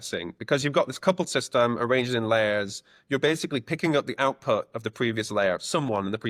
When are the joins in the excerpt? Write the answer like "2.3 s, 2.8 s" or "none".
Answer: none

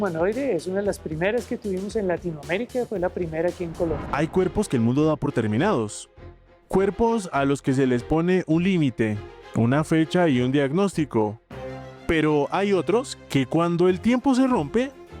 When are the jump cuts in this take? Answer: 4.1 s

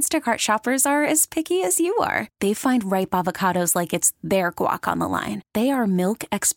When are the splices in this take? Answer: none

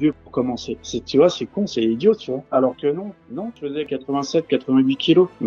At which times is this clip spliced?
2.4 s, 3.8 s

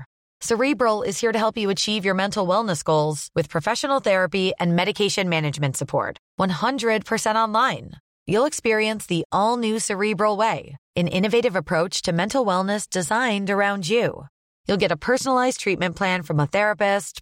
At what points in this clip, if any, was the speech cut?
none

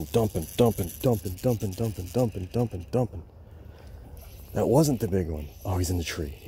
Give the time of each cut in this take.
none

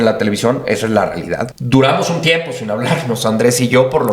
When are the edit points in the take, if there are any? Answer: 1.5 s

